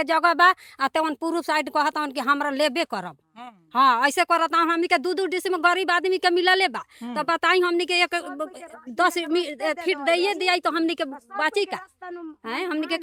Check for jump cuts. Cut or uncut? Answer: uncut